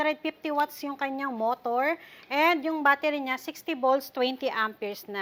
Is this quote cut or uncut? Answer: uncut